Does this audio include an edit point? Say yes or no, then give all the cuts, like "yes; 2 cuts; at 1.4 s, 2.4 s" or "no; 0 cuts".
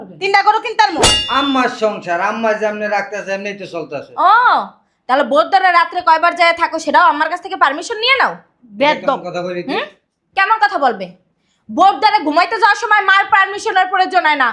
yes; 1 cut; at 1.2 s